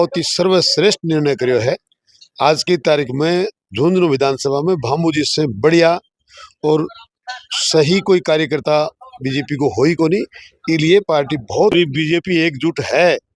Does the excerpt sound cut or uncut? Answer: cut